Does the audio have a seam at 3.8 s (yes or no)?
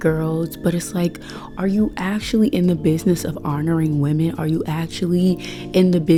no